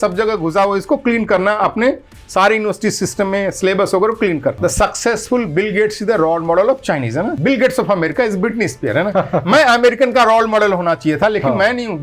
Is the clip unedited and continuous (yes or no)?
no